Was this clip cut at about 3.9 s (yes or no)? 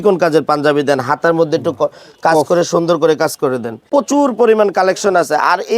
yes